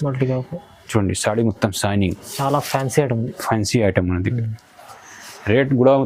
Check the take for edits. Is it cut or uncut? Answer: uncut